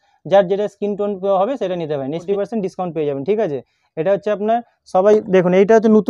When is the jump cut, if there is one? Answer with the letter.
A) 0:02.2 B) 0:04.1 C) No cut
A